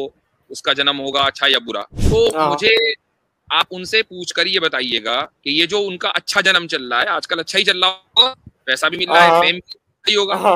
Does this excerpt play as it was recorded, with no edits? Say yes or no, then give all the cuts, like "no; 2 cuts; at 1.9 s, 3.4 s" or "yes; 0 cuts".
no; 2 cuts; at 1.9 s, 5.4 s